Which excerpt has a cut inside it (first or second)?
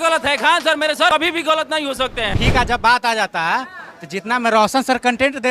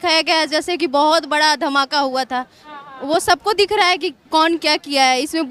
first